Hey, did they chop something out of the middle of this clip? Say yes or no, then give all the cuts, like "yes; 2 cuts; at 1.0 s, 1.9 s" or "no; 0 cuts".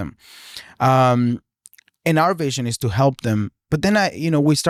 no; 0 cuts